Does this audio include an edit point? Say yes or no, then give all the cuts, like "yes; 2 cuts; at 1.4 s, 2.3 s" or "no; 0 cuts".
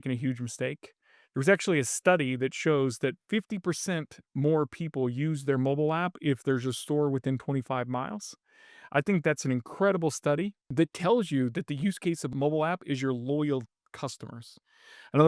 yes; 2 cuts; at 10.6 s, 12.3 s